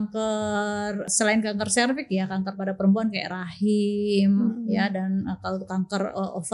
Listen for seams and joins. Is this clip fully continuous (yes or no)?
no